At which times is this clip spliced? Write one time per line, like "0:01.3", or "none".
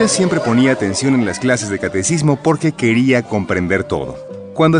none

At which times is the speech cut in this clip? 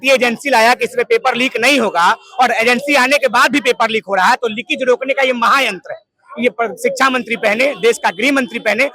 none

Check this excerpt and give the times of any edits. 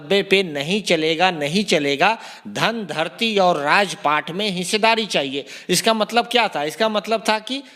none

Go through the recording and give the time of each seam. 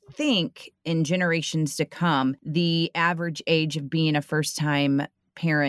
0:02.4

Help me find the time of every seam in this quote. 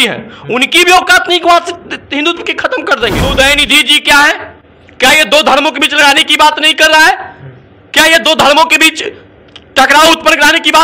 0:03.2

